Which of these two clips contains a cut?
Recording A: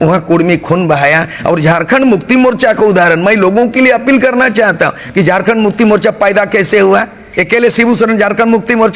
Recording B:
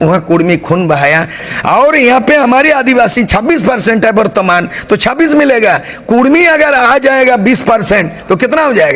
B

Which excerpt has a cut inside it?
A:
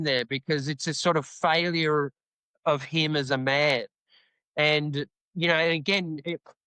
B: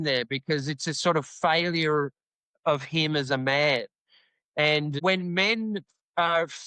B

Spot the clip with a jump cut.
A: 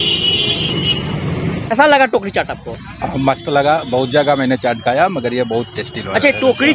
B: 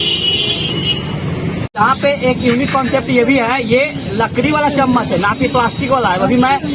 A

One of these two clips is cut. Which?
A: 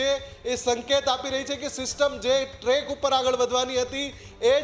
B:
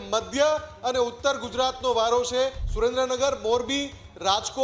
B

